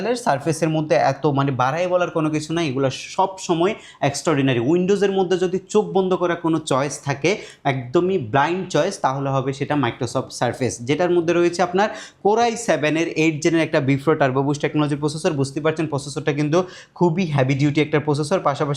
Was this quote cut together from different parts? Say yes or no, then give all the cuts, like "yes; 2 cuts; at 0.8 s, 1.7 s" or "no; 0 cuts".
no; 0 cuts